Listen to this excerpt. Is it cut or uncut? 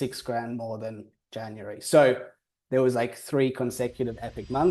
uncut